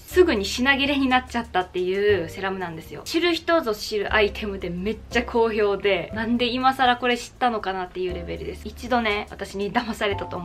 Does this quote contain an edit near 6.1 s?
yes; 3 cuts; at 3.0 s, 6.1 s, 8.6 s

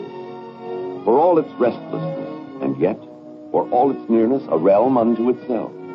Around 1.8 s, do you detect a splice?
yes; 1 cut; at 1.8 s

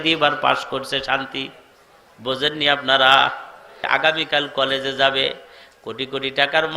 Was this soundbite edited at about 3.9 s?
yes; 1 cut; at 3.9 s

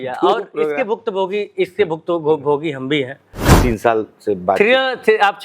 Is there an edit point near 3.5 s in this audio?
yes; 1 cut; at 3.5 s

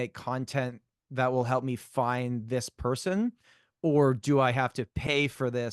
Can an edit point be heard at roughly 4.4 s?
no; 0 cuts

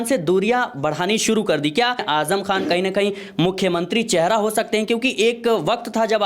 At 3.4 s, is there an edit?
no; 1 cut; at 2.0 s

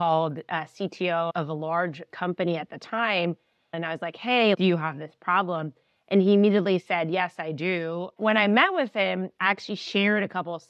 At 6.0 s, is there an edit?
no; 2 cuts; at 3.7 s, 8.2 s

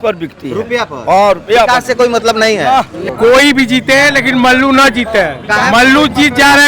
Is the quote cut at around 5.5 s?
no; 1 cut; at 3.0 s

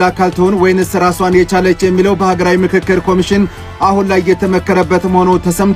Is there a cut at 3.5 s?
no; 0 cuts

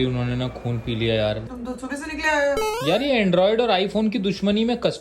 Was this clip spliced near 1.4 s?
yes; 1 cut; at 1.4 s

